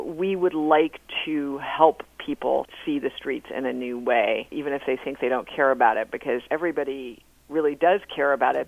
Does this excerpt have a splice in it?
yes; 3 cuts; at 2.7 s, 4.5 s, 6.4 s

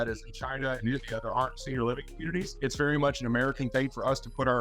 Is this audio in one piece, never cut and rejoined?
no; 1 cut; at 2.5 s

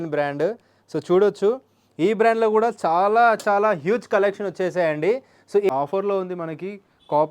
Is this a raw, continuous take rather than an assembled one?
no; 1 cut; at 5.7 s

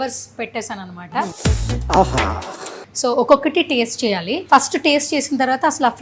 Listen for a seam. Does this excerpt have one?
yes; 3 cuts; at 1.3 s, 2.8 s, 4.3 s

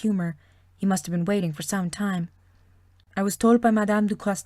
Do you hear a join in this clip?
yes; 1 cut; at 1.4 s

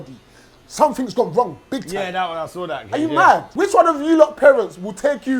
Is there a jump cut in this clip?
yes; 1 cut; at 3.5 s

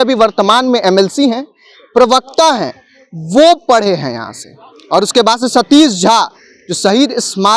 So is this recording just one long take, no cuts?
yes; 0 cuts

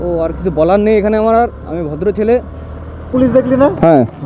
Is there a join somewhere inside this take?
yes; 1 cut; at 3.1 s

